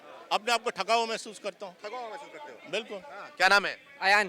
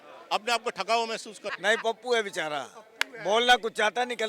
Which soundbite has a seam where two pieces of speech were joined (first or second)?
second